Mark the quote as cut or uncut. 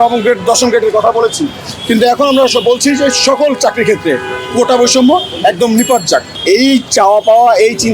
cut